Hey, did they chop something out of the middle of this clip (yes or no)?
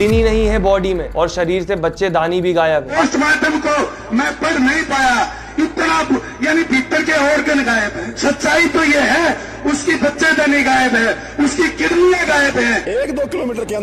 yes